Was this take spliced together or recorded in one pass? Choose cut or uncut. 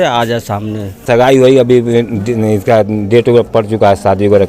cut